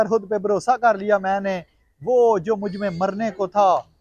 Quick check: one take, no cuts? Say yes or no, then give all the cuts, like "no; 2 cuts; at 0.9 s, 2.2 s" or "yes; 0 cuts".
yes; 0 cuts